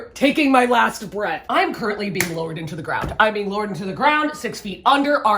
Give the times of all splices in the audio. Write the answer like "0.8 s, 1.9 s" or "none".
1.4 s